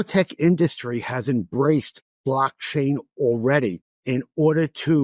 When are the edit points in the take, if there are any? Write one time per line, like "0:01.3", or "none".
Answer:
0:03.9